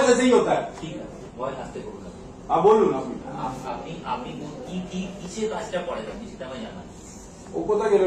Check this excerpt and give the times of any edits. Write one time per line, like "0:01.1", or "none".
none